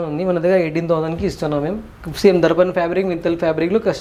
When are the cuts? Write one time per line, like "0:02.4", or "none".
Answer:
none